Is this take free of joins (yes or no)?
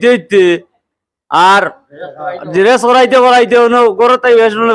yes